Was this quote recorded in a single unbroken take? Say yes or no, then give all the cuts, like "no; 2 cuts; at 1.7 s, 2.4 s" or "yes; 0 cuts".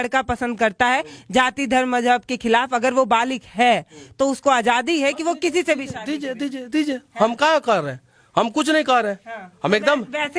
yes; 0 cuts